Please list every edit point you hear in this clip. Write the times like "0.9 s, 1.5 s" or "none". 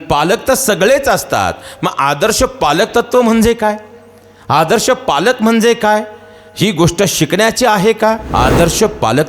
8.2 s